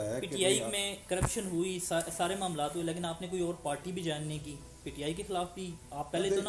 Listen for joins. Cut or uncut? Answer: uncut